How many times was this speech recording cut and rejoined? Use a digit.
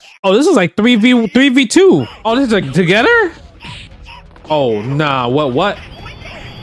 1